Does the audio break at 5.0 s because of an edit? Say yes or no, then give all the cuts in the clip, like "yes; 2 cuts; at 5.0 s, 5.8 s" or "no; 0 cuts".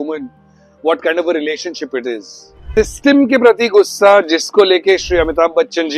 no; 1 cut; at 2.6 s